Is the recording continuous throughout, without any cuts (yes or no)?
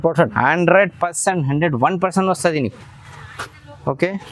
yes